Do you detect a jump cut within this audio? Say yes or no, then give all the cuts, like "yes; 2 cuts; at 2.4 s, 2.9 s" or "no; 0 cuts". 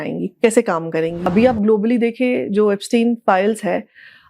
yes; 1 cut; at 1.3 s